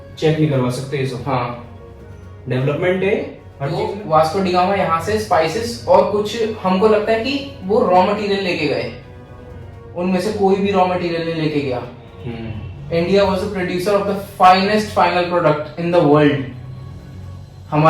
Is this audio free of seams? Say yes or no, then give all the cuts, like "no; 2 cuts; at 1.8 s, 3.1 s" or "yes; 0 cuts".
no; 1 cut; at 3.8 s